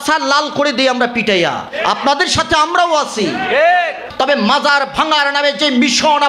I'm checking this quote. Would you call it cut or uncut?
cut